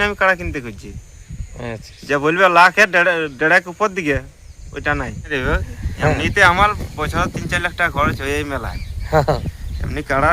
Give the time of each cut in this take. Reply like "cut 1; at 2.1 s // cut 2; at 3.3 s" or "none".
cut 1; at 5.3 s